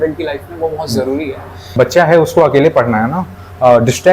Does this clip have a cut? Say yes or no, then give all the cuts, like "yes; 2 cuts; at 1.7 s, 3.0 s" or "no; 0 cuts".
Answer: yes; 1 cut; at 1.7 s